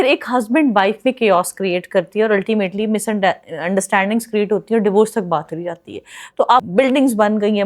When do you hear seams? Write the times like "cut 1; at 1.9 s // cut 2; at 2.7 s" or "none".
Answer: cut 1; at 6.6 s